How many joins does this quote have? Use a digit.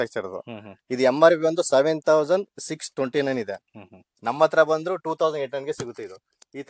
0